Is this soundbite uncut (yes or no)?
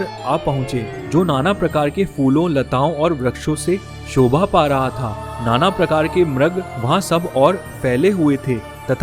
yes